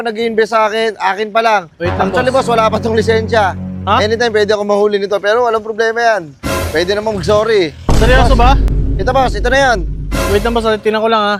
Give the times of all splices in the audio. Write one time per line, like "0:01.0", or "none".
none